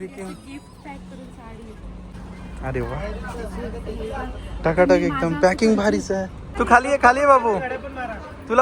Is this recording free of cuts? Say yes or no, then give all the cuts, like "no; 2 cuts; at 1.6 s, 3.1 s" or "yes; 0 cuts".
no; 2 cuts; at 2.2 s, 6.4 s